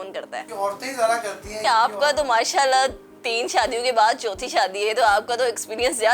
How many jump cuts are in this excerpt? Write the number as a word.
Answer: one